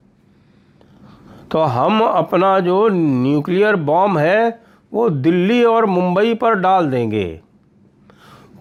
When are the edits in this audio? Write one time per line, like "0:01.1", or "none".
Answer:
none